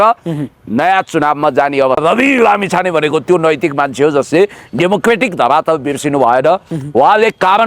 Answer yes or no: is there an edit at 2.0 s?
yes